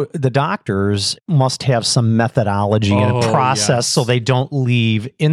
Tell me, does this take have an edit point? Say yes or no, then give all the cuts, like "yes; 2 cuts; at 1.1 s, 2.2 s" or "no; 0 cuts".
yes; 1 cut; at 1.2 s